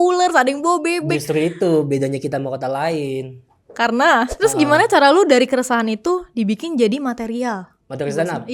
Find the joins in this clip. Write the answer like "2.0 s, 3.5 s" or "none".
4.3 s